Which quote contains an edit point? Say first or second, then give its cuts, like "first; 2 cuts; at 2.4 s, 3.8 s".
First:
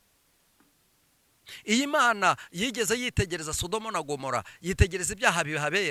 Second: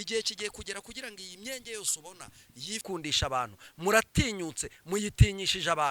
second; 1 cut; at 2.8 s